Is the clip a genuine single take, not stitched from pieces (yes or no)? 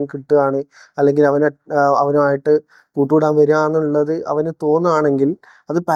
yes